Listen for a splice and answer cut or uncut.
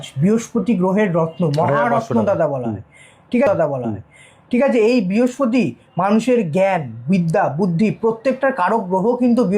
uncut